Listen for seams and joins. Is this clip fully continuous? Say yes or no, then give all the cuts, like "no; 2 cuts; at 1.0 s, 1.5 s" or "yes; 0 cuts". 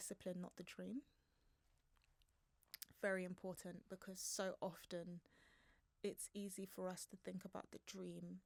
yes; 0 cuts